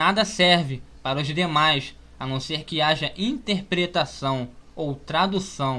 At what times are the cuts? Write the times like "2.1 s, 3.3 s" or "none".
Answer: 4.6 s